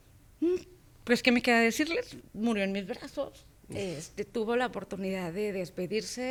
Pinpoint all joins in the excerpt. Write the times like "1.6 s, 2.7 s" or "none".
none